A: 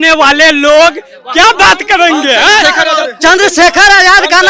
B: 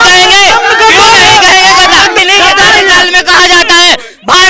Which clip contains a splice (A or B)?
B